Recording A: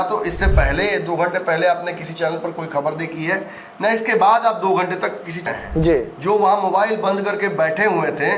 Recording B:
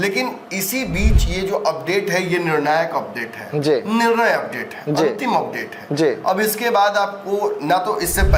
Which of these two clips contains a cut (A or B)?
A